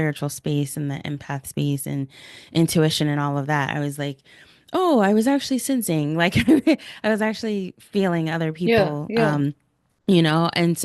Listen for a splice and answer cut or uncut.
uncut